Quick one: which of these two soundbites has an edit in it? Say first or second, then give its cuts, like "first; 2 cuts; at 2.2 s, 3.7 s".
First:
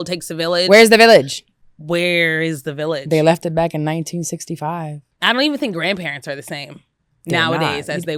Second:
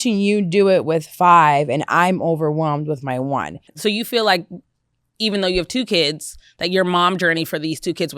second; 1 cut; at 3.6 s